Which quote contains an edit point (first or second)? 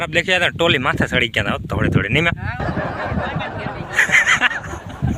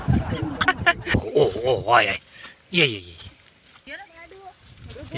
second